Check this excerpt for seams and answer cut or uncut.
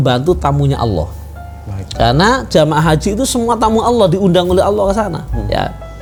uncut